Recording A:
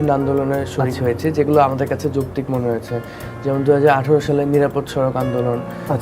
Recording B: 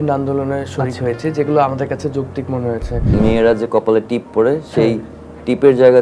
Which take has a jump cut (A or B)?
B